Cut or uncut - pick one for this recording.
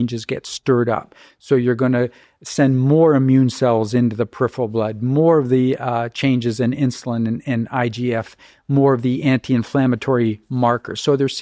uncut